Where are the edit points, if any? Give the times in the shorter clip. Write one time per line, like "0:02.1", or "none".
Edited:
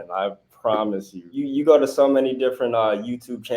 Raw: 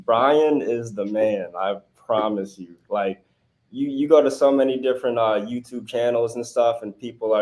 0:01.2